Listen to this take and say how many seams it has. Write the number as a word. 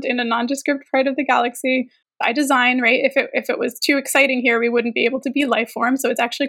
one